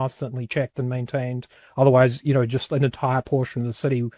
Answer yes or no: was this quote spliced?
no